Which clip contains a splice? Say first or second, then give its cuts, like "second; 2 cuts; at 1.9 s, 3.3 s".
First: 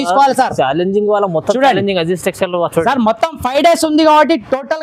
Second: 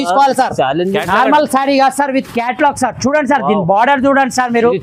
second; 1 cut; at 1.0 s